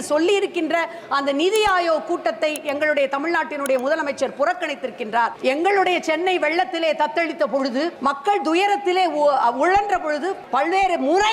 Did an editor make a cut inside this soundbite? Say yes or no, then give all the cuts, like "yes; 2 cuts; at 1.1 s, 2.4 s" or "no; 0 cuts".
yes; 3 cuts; at 5.4 s, 7.9 s, 10.4 s